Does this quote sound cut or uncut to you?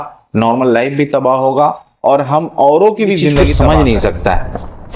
cut